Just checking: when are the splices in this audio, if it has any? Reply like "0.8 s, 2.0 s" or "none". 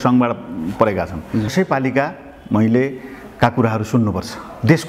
1.5 s